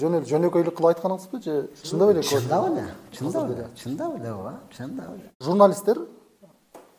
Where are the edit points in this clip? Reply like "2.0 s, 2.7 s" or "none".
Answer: 5.3 s